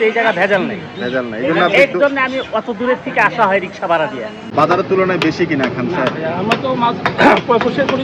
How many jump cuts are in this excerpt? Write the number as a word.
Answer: one